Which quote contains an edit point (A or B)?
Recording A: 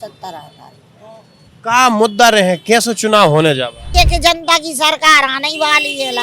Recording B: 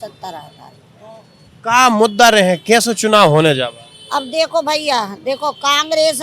A